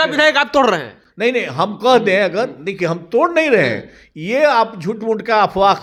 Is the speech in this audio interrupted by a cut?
no; 0 cuts

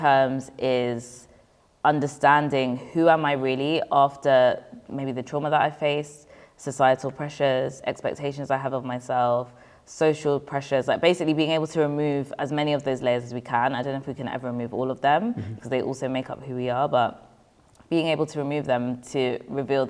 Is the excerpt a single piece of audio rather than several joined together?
yes; 0 cuts

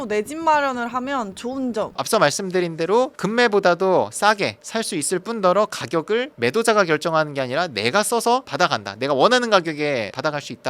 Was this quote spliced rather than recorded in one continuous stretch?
no; 0 cuts

